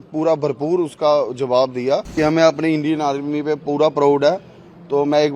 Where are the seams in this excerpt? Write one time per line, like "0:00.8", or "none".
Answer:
0:02.1